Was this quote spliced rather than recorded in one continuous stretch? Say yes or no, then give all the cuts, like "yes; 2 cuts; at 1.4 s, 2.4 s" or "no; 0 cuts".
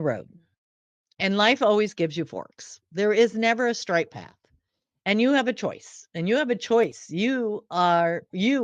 no; 0 cuts